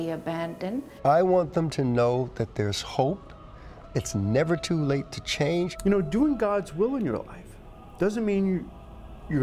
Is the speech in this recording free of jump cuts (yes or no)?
no